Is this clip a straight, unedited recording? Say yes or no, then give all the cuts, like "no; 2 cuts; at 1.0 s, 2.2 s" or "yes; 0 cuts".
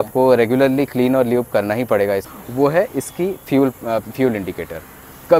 no; 1 cut; at 2.3 s